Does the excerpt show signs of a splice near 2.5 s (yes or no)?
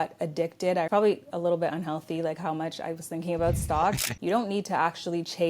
no